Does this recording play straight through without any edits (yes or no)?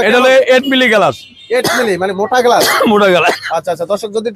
yes